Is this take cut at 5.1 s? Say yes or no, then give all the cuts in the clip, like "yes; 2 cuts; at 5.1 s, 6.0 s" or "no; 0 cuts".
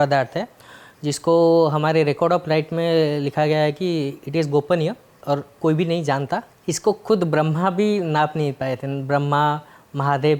yes; 2 cuts; at 5.1 s, 6.5 s